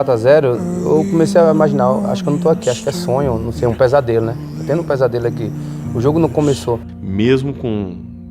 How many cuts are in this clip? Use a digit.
1